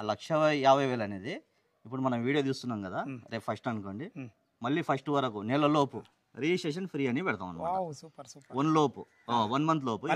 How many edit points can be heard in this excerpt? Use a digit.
1